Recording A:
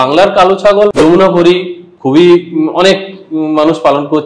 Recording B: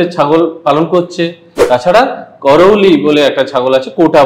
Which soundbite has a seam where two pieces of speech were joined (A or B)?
A